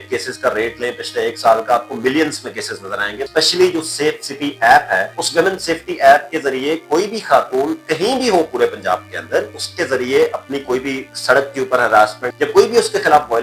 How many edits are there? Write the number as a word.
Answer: four